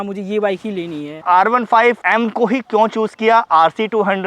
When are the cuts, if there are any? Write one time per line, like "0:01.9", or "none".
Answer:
0:01.2